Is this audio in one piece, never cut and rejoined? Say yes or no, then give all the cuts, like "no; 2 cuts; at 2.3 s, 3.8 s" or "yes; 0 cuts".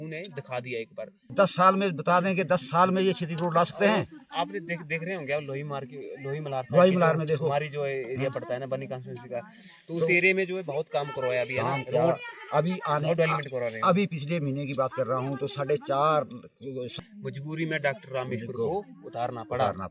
no; 2 cuts; at 1.3 s, 16.9 s